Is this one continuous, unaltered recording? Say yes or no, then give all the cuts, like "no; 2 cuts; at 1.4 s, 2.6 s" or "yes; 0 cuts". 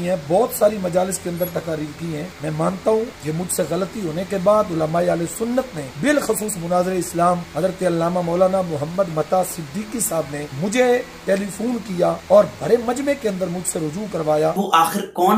no; 7 cuts; at 2.3 s, 3.2 s, 5.8 s, 7.5 s, 10.5 s, 12.2 s, 14.6 s